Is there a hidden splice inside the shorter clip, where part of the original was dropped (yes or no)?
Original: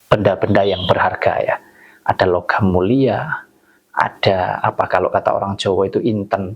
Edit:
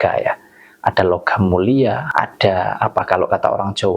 yes